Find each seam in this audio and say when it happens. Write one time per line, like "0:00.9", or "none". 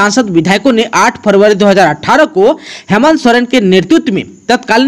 none